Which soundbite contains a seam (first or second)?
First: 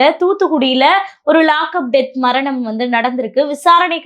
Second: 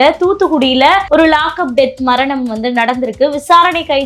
second